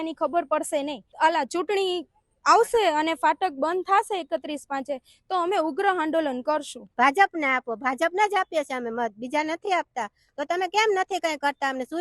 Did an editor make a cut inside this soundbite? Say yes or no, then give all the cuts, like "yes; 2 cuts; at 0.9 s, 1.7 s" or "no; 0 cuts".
yes; 2 cuts; at 1.0 s, 6.8 s